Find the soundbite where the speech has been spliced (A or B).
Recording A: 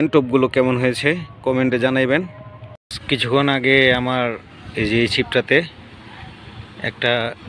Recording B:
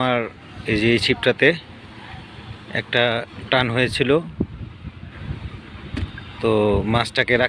A